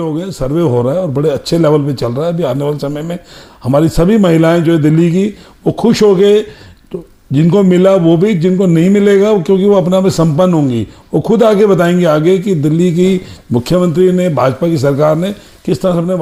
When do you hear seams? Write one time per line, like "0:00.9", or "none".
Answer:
none